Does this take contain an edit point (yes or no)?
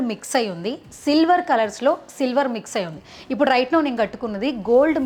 no